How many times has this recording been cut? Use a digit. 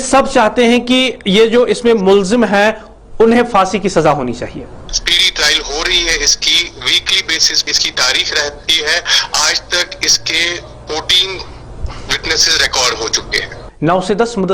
2